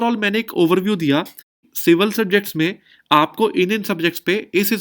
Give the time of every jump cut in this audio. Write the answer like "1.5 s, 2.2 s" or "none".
1.6 s